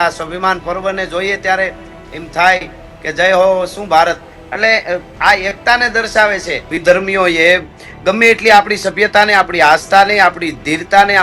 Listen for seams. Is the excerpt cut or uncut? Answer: cut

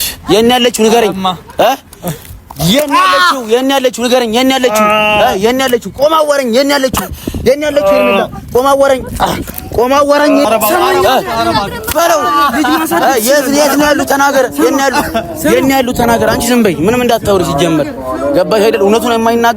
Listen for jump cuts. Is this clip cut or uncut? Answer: cut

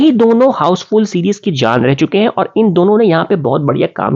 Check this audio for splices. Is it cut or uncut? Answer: uncut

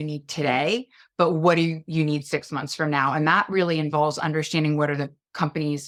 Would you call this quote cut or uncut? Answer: uncut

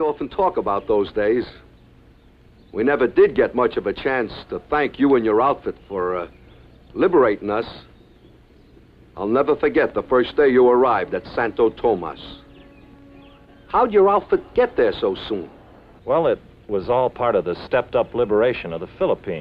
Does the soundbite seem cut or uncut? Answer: uncut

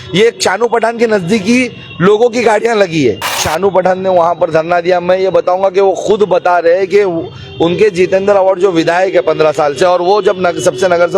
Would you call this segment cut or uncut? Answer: cut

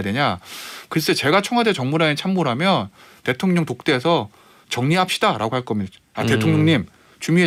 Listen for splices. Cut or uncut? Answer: uncut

